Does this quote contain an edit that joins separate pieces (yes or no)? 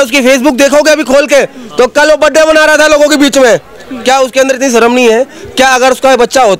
no